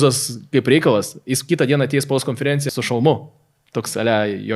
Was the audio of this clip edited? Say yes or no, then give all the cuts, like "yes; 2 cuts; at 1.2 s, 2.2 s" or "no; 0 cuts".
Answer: yes; 1 cut; at 2.7 s